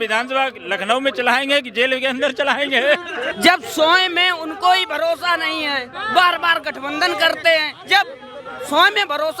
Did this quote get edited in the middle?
yes; 1 cut; at 3.3 s

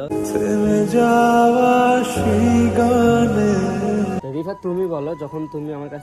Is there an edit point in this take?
yes; 1 cut; at 4.2 s

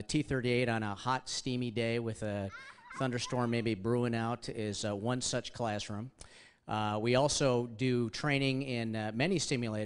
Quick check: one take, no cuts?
no; 1 cut; at 3.2 s

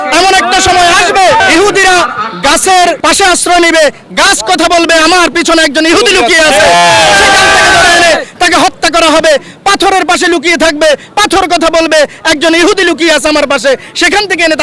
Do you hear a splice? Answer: yes; 2 cuts; at 1.4 s, 3.0 s

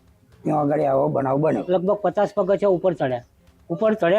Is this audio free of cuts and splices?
no; 1 cut; at 1.6 s

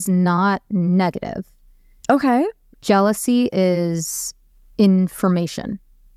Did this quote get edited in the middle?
no; 0 cuts

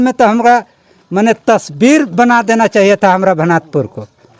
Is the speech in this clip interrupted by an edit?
no; 0 cuts

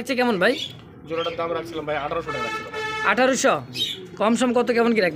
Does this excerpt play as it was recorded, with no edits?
yes; 0 cuts

